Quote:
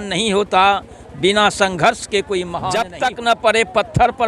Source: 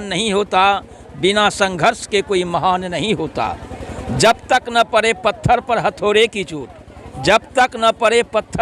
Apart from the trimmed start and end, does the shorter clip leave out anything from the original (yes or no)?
yes